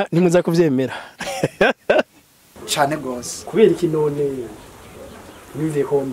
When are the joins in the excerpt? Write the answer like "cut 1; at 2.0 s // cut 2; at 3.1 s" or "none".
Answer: cut 1; at 2.5 s